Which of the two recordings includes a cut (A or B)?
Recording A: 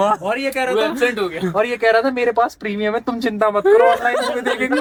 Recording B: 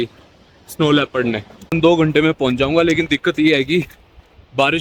B